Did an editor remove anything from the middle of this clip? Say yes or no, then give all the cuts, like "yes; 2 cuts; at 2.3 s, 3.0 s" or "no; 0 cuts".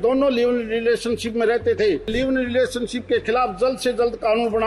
yes; 1 cut; at 2.1 s